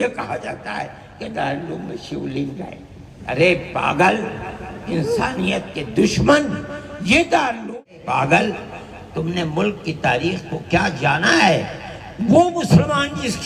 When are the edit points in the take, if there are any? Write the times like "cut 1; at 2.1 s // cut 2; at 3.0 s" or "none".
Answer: cut 1; at 7.8 s